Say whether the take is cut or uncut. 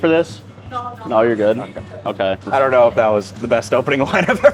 uncut